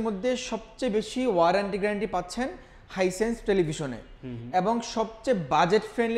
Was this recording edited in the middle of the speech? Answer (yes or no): no